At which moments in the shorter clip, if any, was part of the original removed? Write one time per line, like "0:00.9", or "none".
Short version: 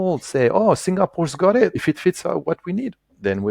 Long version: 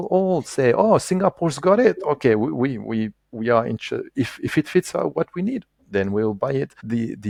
0:01.8